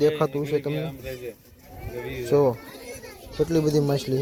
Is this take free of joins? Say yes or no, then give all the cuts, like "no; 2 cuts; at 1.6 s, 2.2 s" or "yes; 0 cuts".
yes; 0 cuts